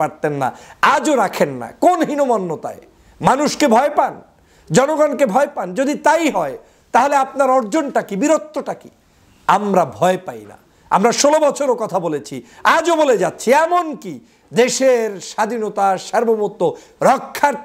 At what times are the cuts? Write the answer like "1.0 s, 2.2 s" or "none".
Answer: none